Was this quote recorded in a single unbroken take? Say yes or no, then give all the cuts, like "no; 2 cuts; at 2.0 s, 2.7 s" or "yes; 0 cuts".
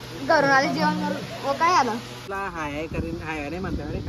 no; 1 cut; at 2.3 s